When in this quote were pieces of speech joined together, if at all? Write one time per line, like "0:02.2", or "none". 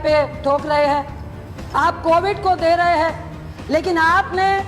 none